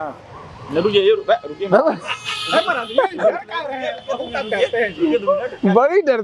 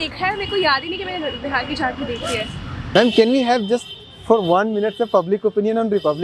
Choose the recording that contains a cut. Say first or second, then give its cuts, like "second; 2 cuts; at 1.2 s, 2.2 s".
second; 1 cut; at 2.9 s